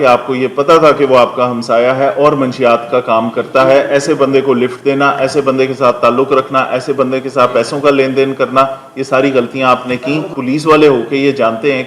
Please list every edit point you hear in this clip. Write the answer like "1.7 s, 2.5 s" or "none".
10.3 s